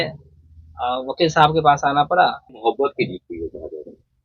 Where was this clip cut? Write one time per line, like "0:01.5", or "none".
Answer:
0:02.6